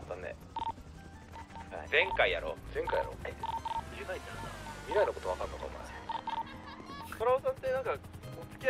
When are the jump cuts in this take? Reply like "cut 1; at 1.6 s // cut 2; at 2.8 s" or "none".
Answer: cut 1; at 7.2 s